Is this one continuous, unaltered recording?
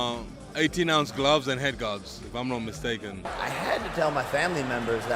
no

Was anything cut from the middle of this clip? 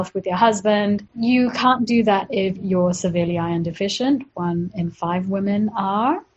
yes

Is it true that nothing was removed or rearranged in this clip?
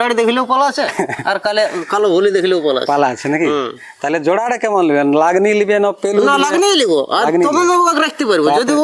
yes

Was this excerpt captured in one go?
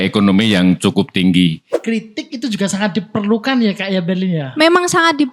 no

